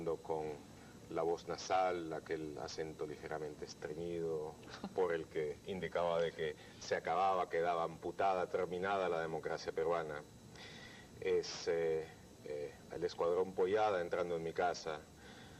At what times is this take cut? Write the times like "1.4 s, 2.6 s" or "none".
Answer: 14.3 s